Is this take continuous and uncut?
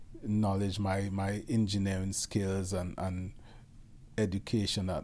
yes; 0 cuts

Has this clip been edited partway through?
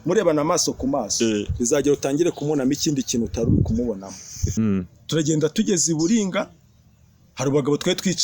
yes; 1 cut; at 4.4 s

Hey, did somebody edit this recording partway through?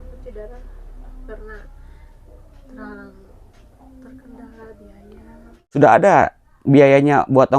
yes; 1 cut; at 5.8 s

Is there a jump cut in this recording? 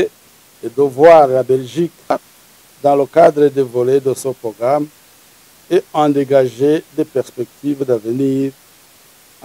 yes; 1 cut; at 2.1 s

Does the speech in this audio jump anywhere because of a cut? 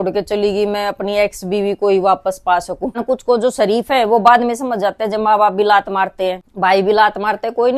yes; 2 cuts; at 3.0 s, 6.5 s

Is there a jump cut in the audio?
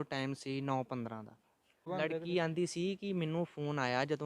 yes; 1 cut; at 1.8 s

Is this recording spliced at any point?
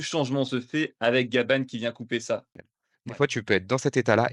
yes; 1 cut; at 2.6 s

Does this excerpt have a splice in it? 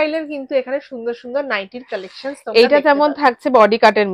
no; 0 cuts

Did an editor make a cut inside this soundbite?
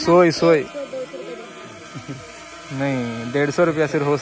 no; 0 cuts

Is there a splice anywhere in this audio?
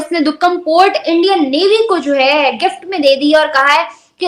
no; 0 cuts

